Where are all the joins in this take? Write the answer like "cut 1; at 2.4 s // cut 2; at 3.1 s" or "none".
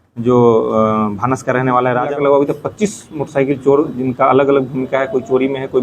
cut 1; at 2.1 s